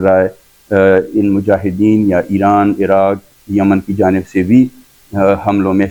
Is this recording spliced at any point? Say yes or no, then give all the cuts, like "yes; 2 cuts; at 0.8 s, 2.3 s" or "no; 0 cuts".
no; 0 cuts